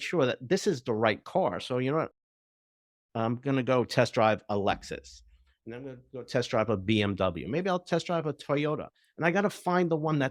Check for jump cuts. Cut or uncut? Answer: uncut